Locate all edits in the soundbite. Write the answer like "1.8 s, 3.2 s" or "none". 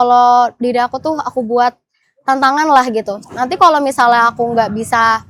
none